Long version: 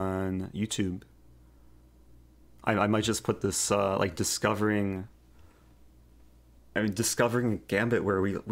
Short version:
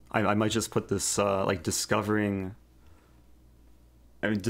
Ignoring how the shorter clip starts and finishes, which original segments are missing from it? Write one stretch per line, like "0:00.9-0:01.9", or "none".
none